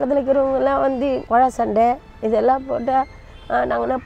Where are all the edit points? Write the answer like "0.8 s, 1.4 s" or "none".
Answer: 1.3 s